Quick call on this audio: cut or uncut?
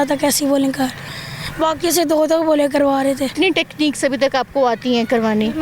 cut